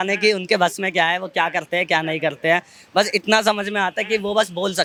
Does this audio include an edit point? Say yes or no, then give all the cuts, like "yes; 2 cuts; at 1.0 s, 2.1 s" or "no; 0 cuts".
no; 0 cuts